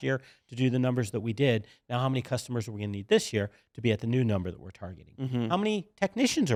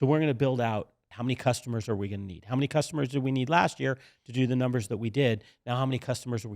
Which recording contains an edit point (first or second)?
second